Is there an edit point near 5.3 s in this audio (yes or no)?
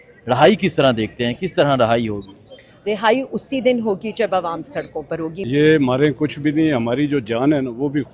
yes